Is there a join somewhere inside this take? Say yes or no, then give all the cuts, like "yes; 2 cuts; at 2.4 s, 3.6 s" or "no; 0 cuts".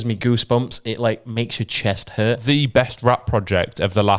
yes; 1 cut; at 2.4 s